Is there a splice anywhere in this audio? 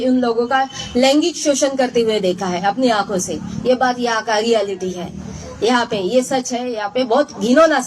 no; 0 cuts

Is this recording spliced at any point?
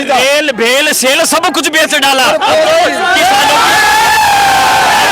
no; 0 cuts

